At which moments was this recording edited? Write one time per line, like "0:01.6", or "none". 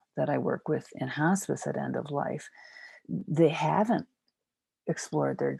none